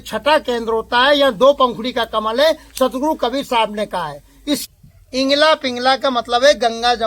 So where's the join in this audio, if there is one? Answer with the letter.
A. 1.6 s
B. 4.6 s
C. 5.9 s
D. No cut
B